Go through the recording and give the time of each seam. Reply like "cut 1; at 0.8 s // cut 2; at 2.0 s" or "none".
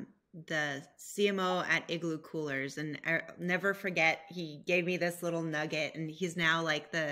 none